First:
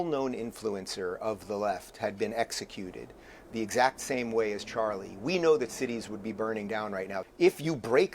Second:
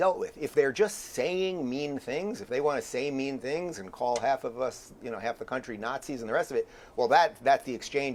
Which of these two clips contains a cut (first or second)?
first